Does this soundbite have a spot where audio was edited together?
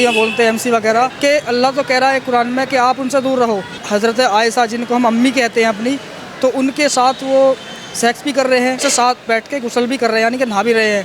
yes; 3 cuts; at 1.1 s, 3.7 s, 8.8 s

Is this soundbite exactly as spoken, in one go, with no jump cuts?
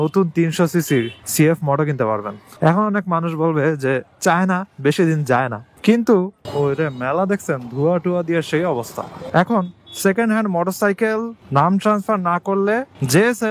no; 2 cuts; at 6.4 s, 9.2 s

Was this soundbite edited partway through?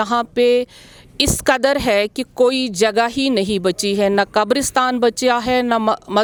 no; 0 cuts

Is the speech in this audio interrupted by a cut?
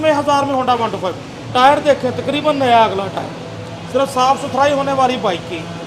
no; 0 cuts

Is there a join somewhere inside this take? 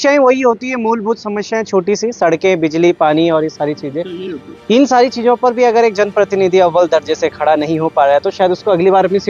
no; 0 cuts

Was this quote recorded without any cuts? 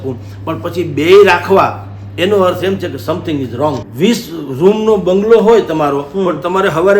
no; 1 cut; at 3.9 s

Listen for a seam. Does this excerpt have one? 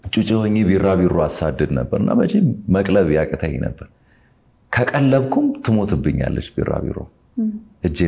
yes; 1 cut; at 7.1 s

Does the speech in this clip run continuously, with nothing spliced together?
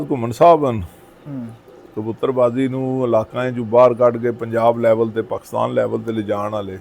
yes; 0 cuts

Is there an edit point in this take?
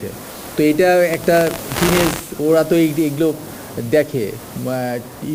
no; 0 cuts

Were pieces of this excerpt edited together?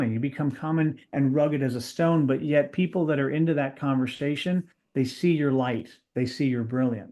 no; 0 cuts

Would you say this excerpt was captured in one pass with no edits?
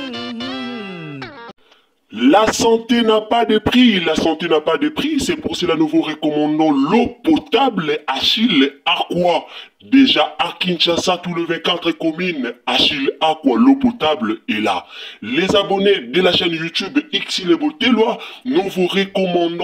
no; 1 cut; at 1.5 s

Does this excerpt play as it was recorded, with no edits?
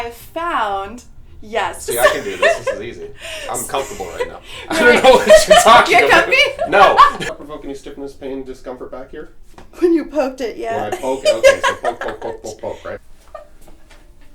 no; 2 cuts; at 7.2 s, 13.0 s

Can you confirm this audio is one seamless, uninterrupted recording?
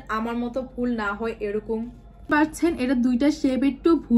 yes; 0 cuts

